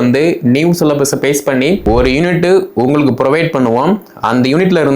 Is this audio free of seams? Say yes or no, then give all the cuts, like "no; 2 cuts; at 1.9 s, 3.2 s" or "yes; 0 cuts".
no; 1 cut; at 1.8 s